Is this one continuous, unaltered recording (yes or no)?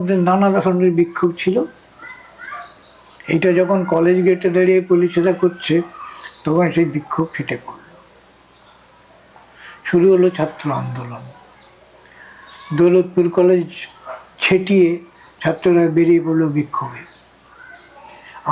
yes